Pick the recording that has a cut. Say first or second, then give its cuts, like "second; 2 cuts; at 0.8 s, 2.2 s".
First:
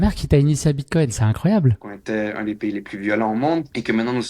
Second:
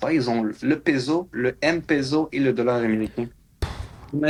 first; 1 cut; at 1.9 s